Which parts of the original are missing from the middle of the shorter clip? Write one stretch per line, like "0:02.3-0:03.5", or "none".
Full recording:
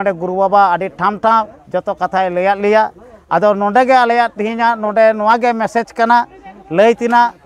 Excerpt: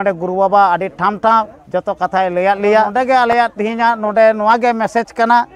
0:02.9-0:03.7